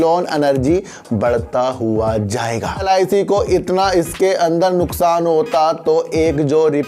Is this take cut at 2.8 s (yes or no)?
yes